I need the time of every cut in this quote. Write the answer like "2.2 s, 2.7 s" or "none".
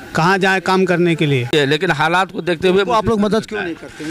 1.5 s